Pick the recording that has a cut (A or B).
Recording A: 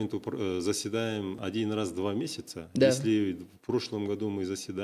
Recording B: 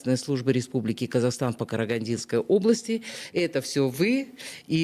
A